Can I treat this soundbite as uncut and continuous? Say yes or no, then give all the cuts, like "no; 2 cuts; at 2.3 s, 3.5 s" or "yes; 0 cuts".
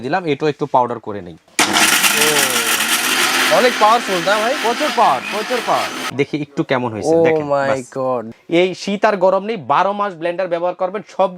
no; 3 cuts; at 3.1 s, 6.0 s, 8.3 s